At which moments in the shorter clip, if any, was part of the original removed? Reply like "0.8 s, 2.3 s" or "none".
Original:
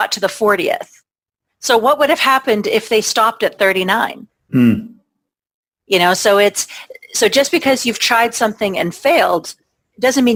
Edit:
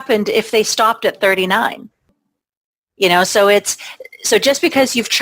2.0 s